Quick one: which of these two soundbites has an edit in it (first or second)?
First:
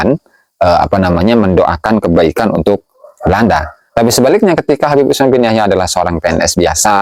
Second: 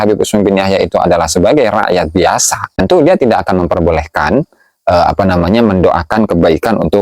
second